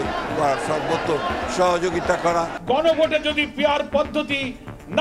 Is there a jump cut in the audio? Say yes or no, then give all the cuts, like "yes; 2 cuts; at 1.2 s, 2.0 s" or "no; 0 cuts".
yes; 1 cut; at 2.2 s